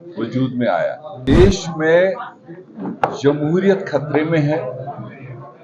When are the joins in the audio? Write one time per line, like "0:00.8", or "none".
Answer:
0:01.2